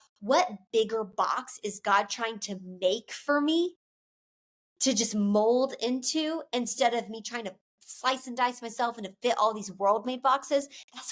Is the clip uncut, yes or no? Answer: yes